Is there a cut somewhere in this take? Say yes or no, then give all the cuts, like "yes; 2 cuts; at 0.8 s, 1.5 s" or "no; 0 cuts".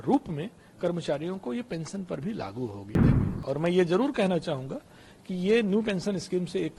yes; 1 cut; at 3.1 s